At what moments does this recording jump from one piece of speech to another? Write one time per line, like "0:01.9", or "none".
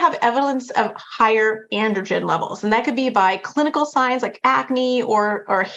none